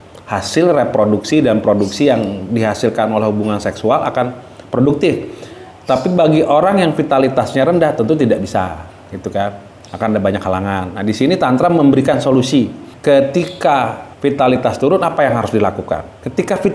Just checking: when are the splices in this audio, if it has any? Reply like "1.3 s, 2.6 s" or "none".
12.9 s, 14.0 s